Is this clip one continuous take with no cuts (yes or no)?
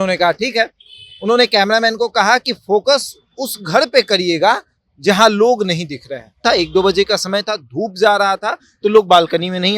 no